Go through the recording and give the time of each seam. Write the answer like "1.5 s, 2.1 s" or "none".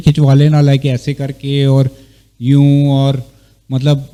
none